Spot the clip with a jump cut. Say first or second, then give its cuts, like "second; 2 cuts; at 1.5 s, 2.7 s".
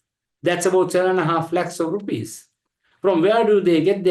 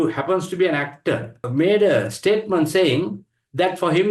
second; 1 cut; at 1.4 s